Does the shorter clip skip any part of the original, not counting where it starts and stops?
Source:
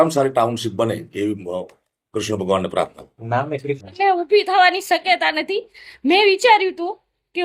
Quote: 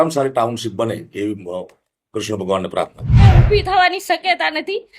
yes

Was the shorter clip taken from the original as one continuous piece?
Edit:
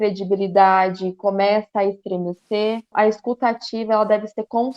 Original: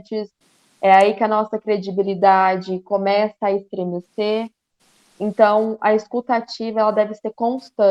no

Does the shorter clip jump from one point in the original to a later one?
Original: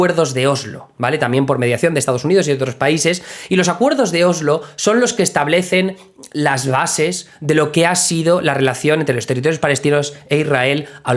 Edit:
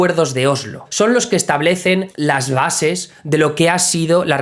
yes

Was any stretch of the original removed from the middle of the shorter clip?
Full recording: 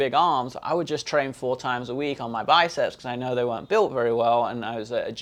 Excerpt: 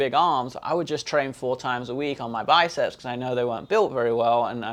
no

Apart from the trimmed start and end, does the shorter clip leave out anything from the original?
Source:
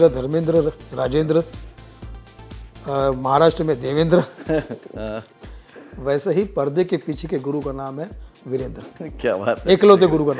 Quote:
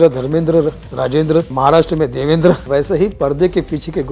yes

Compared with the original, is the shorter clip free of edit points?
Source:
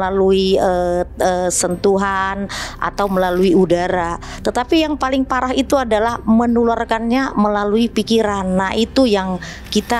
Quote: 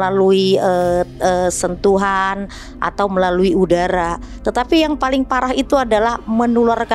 yes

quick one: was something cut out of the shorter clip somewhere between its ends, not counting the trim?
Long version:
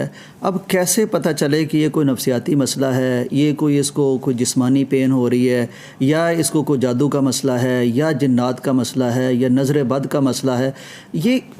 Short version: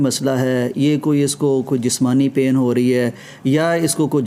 no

